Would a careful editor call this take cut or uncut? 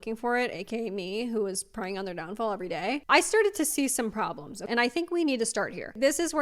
cut